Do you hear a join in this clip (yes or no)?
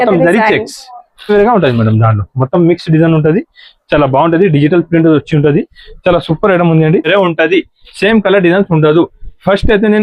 yes